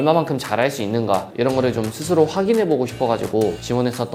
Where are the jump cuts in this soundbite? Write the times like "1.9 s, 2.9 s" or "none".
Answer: none